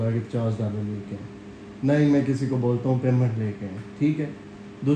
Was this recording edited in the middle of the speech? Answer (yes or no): no